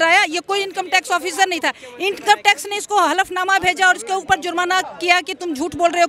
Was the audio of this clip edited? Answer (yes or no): no